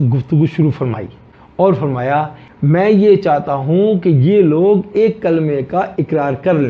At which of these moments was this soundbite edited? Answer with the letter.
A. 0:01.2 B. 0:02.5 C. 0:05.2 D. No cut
B